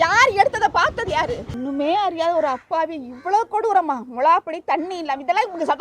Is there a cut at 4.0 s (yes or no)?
no